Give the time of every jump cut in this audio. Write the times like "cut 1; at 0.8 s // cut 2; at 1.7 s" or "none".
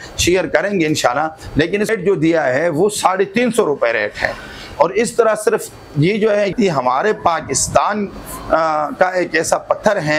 cut 1; at 1.9 s // cut 2; at 6.5 s